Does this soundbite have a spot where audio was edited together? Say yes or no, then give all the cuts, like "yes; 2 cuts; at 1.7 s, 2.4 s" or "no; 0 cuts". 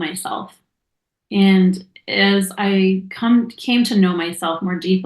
no; 0 cuts